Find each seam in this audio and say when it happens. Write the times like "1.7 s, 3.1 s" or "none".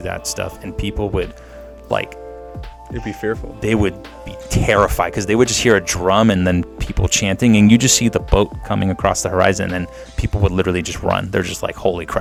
none